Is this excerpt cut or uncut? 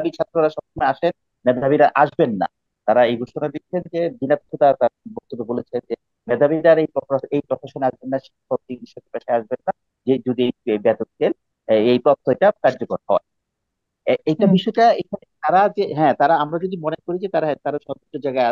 uncut